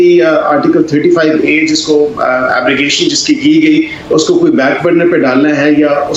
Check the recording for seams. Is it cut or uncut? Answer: uncut